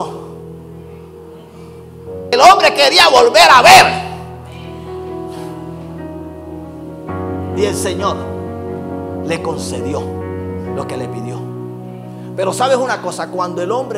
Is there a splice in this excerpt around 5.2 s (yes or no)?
no